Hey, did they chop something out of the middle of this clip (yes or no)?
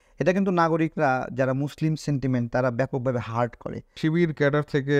yes